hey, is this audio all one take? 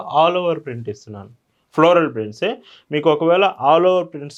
yes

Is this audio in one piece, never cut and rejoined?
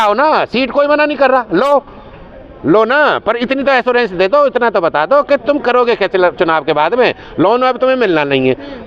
yes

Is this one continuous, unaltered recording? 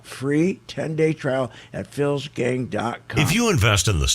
no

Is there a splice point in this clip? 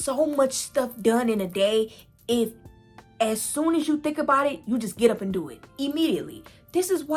no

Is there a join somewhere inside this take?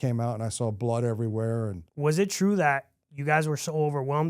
yes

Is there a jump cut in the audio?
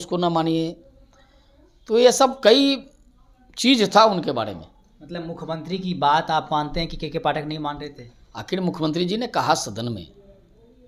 no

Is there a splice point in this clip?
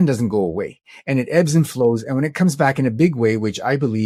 no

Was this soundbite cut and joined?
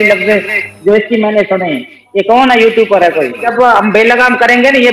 yes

